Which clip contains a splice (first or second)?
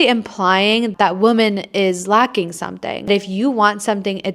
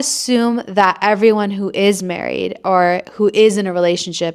first